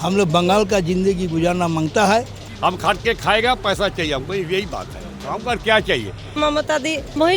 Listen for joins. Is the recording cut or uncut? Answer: cut